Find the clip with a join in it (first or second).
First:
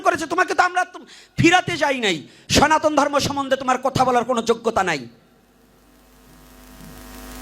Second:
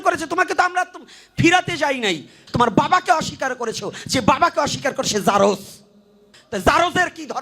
second